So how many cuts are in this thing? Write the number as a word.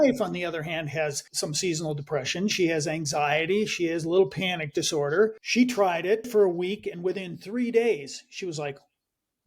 three